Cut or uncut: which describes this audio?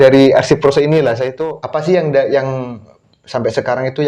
cut